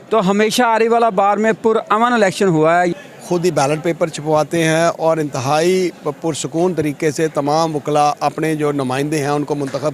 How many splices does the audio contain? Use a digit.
1